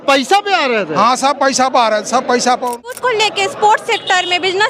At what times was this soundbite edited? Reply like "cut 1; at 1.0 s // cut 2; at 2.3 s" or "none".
cut 1; at 2.9 s